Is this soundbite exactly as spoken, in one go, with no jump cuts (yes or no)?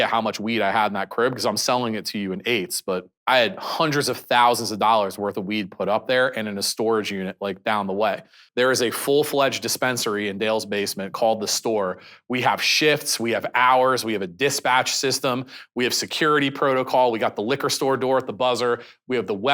no